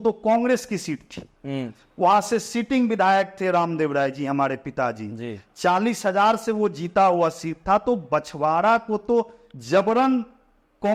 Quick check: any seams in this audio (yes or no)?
no